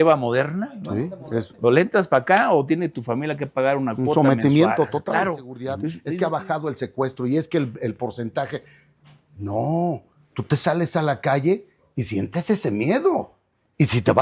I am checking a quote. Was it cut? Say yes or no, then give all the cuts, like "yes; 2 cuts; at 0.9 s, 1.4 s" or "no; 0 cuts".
yes; 1 cut; at 5.9 s